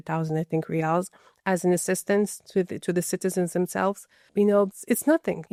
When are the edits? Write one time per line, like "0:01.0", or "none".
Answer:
none